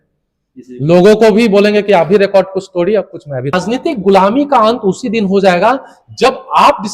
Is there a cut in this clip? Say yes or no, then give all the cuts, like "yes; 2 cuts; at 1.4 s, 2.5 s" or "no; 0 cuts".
yes; 1 cut; at 3.5 s